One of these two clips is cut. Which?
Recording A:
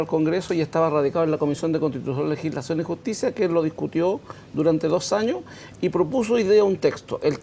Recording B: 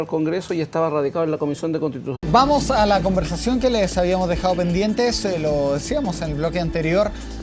A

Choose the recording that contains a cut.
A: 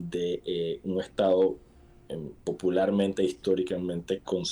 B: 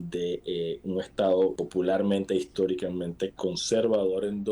B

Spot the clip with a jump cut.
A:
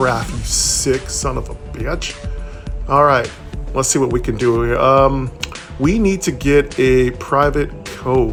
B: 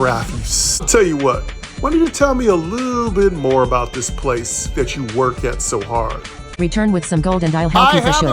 B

